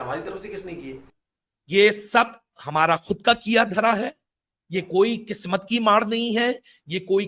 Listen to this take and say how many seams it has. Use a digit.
1